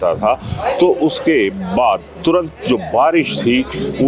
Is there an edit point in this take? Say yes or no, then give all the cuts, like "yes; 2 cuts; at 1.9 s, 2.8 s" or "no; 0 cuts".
no; 0 cuts